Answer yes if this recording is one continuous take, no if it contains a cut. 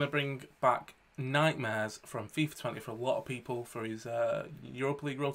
yes